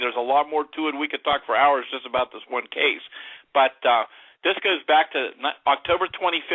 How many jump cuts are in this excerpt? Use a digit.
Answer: 1